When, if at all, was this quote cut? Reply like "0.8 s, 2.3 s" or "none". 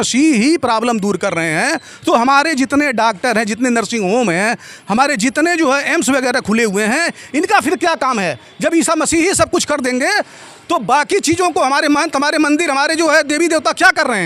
none